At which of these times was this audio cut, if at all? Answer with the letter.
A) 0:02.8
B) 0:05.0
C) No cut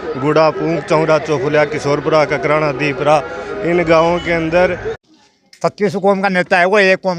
B